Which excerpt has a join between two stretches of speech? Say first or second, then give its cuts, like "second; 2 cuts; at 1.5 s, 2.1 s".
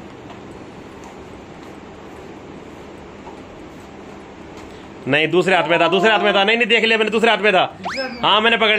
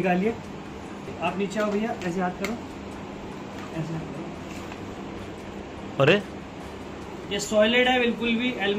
second; 1 cut; at 1.0 s